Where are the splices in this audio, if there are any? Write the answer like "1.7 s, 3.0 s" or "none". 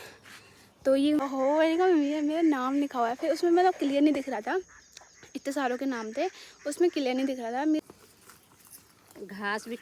1.2 s, 7.8 s